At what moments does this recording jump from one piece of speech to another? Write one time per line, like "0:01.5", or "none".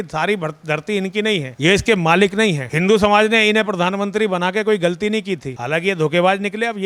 none